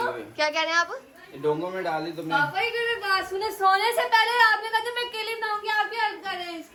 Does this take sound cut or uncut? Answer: uncut